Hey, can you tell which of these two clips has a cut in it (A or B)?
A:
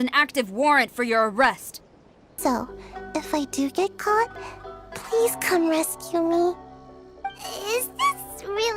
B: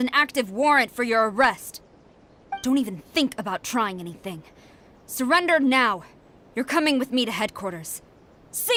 A